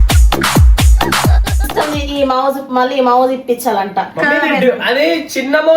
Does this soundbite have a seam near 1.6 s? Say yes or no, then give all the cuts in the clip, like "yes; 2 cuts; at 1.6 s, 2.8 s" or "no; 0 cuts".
yes; 1 cut; at 1.6 s